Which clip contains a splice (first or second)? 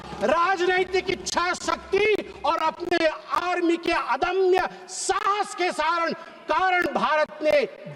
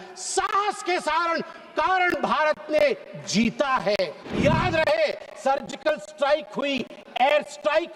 second